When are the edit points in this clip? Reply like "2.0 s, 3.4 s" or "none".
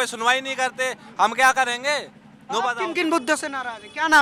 none

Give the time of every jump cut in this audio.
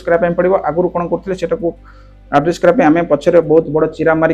none

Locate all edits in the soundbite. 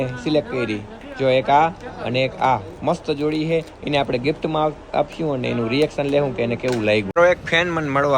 7.1 s

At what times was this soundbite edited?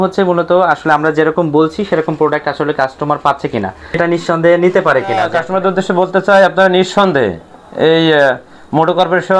4.0 s, 5.4 s

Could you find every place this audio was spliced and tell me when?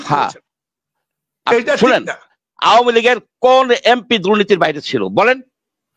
2.5 s

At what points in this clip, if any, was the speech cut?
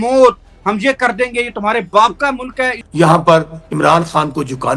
2.8 s

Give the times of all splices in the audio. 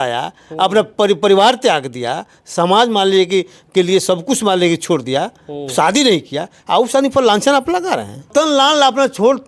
8.3 s

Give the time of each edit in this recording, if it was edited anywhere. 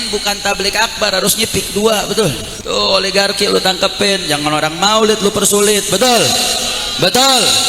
2.5 s

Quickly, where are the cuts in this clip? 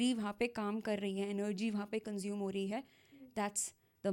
none

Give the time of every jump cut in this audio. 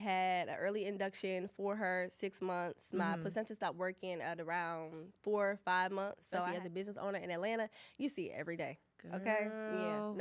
6.5 s

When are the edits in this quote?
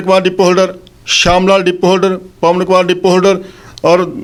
none

